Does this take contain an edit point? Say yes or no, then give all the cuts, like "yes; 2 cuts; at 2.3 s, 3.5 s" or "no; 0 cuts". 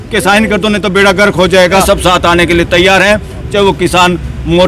yes; 1 cut; at 1.8 s